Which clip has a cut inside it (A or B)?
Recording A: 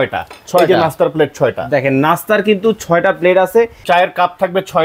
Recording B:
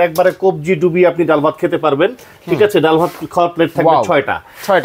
A